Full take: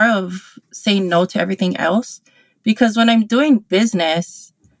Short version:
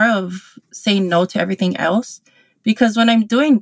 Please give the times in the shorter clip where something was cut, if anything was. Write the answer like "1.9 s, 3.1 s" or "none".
none